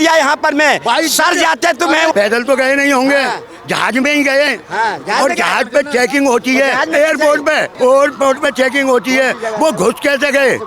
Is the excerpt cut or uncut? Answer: cut